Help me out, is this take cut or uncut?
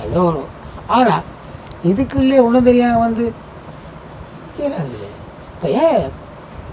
uncut